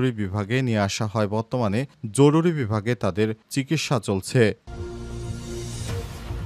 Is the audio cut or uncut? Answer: cut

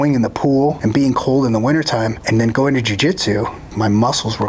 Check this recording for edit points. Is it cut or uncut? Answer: cut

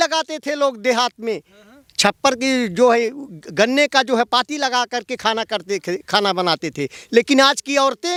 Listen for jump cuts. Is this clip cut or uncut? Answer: uncut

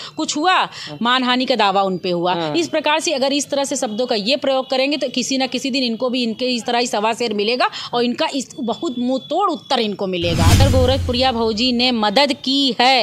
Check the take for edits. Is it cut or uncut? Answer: cut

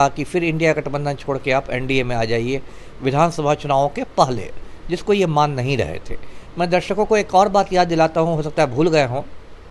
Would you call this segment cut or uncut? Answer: uncut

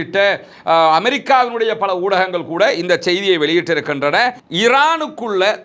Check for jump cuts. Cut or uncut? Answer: cut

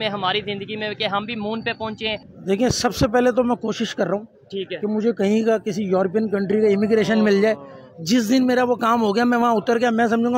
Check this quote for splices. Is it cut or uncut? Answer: cut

